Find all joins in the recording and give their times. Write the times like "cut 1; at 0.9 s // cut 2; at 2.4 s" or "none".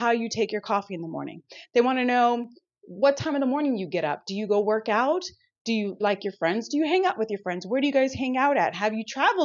cut 1; at 6.0 s